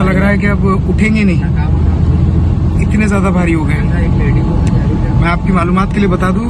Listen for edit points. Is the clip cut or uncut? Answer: uncut